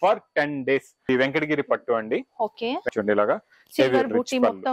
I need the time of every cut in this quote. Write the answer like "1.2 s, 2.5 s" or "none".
1.1 s, 2.9 s